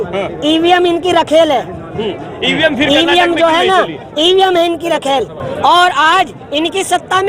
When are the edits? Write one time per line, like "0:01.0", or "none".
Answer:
0:05.4